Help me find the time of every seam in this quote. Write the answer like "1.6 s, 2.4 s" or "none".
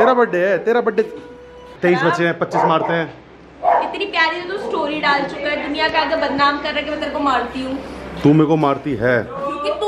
1.6 s